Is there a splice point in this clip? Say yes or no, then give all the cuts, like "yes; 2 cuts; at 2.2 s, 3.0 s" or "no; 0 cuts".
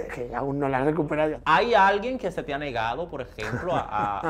yes; 1 cut; at 1.3 s